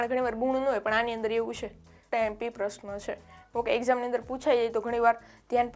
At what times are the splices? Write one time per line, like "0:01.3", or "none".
0:02.1